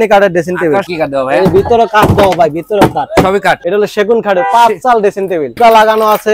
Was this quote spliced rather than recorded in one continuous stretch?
yes; 3 cuts; at 0.9 s, 3.6 s, 5.6 s

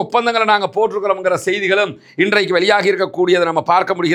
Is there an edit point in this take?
no; 0 cuts

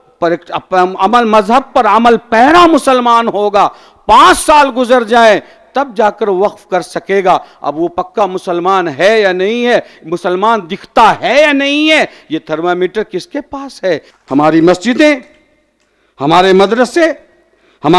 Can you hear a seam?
yes; 1 cut; at 14.1 s

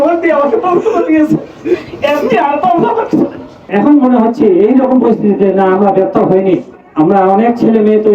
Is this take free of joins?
no; 1 cut; at 3.7 s

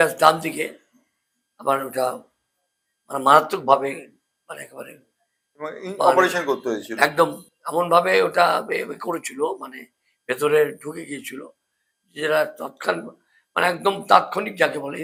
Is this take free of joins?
yes; 0 cuts

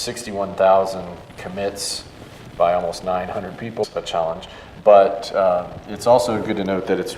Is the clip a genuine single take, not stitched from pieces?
yes; 0 cuts

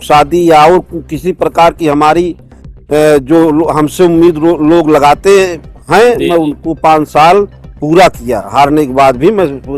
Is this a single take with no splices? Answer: yes; 0 cuts

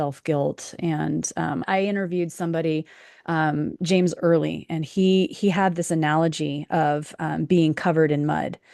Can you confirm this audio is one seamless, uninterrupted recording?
no; 1 cut; at 1.7 s

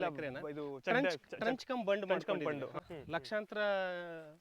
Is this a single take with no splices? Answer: no; 1 cut; at 2.8 s

